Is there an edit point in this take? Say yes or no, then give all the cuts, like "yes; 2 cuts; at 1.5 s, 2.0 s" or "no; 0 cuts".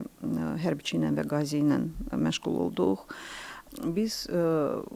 yes; 1 cut; at 3.6 s